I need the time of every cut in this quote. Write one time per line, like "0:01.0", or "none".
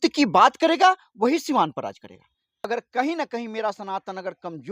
0:02.7